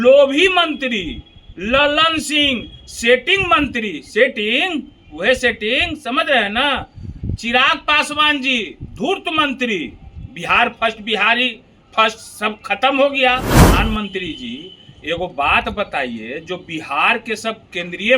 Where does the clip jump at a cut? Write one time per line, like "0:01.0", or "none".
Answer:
0:13.6

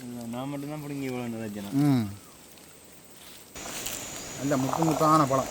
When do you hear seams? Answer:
0:03.6

